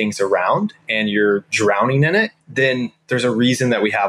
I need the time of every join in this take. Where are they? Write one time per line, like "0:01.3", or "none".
0:02.4